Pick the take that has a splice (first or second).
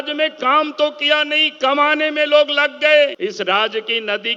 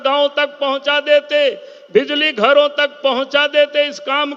first